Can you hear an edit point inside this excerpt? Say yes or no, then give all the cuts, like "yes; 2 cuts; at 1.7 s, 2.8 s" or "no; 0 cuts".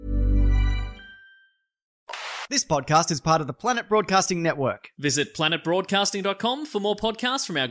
yes; 1 cut; at 2.0 s